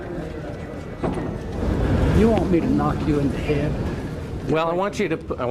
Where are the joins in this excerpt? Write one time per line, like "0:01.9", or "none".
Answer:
0:01.5